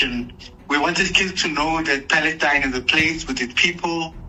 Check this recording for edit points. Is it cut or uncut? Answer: uncut